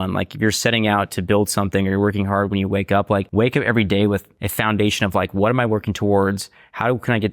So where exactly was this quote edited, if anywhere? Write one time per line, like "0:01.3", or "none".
0:03.3
0:04.4